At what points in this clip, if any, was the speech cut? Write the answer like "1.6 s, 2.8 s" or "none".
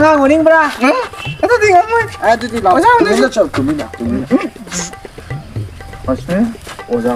none